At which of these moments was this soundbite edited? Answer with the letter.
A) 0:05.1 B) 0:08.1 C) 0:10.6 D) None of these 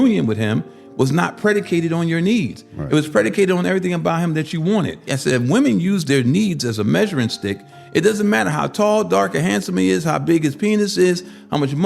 A